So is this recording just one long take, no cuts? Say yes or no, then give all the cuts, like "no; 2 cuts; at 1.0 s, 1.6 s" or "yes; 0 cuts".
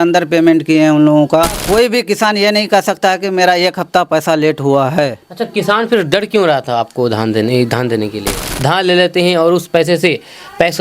no; 2 cuts; at 1.6 s, 8.5 s